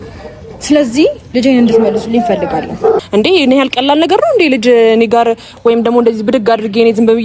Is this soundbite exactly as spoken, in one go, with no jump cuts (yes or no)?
no